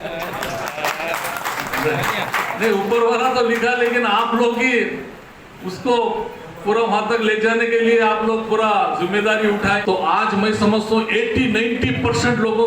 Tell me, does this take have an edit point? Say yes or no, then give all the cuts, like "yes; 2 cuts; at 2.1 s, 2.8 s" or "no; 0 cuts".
yes; 1 cut; at 9.8 s